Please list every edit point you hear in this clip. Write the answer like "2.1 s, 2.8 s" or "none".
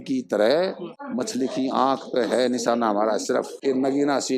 0.9 s, 3.5 s